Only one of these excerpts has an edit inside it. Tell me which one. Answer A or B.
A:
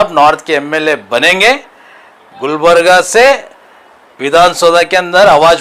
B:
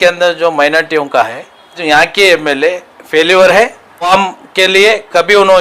B